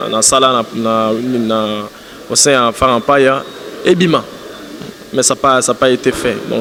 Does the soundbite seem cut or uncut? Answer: uncut